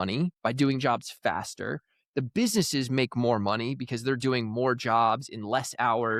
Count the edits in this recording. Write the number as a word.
zero